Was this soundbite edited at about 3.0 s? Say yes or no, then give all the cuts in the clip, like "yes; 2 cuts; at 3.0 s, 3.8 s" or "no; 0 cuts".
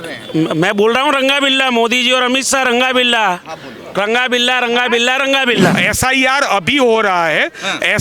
no; 1 cut; at 5.8 s